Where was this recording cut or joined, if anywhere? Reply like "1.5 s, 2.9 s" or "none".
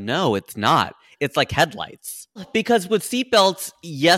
2.5 s